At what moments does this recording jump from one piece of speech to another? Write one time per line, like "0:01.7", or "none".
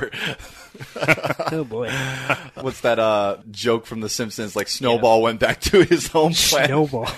0:02.6
0:03.5